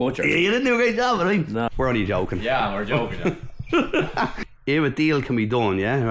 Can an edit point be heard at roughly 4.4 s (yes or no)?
yes